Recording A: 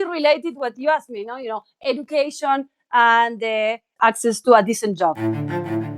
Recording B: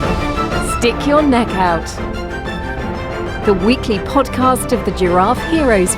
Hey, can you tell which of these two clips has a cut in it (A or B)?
A